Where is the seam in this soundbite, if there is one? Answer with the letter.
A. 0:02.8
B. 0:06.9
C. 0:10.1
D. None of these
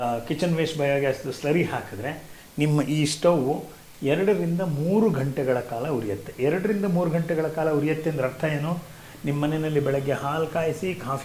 D